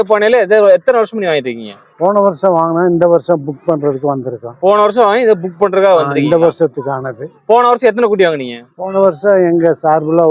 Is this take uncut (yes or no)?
yes